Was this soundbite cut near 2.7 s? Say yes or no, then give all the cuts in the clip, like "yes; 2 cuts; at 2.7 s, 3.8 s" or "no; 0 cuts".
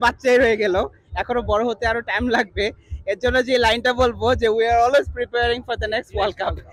no; 0 cuts